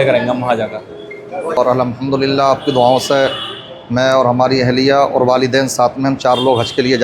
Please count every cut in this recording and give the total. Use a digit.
1